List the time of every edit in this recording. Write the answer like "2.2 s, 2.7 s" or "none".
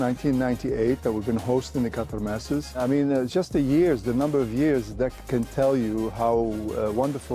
none